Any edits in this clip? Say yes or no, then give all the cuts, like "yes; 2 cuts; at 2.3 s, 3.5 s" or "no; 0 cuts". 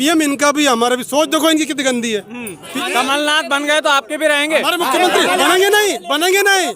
yes; 1 cut; at 2.7 s